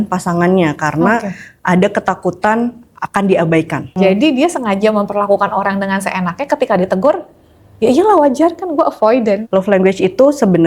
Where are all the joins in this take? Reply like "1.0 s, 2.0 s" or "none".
4.0 s, 9.4 s